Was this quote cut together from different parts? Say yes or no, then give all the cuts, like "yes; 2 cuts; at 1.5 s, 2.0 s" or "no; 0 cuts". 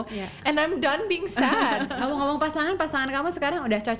yes; 1 cut; at 1.9 s